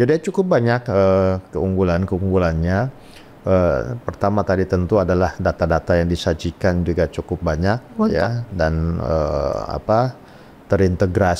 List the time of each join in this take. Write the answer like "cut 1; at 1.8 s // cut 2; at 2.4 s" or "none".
none